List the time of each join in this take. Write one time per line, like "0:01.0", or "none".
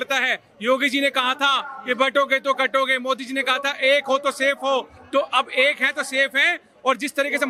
none